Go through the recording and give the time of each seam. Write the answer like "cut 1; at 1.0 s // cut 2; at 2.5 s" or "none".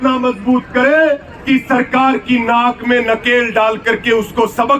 none